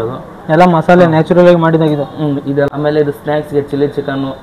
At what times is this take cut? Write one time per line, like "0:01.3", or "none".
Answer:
0:02.7